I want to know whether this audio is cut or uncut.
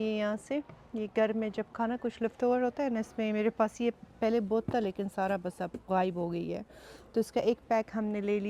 uncut